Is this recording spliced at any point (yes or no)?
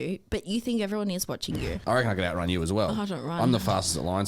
yes